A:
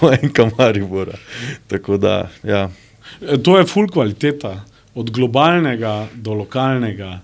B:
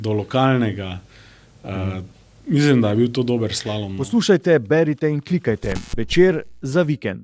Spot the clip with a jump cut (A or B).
B